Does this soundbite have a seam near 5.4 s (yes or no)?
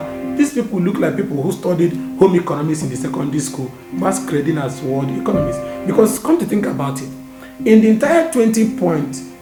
no